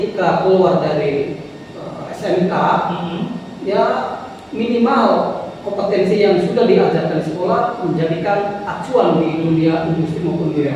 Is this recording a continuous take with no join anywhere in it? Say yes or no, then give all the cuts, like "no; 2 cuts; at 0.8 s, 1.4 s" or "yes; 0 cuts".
yes; 0 cuts